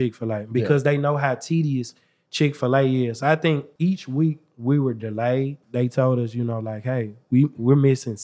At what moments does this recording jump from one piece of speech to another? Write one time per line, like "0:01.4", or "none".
0:03.7
0:05.6